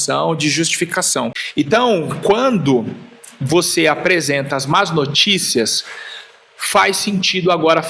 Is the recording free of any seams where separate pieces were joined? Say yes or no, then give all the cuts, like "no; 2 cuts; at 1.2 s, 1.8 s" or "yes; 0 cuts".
no; 1 cut; at 1.4 s